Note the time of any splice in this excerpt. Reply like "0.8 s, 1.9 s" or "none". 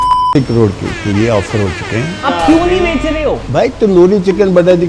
2.1 s